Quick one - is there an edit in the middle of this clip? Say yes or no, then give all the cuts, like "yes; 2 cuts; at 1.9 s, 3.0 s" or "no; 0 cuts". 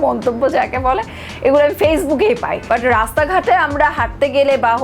yes; 1 cut; at 2.5 s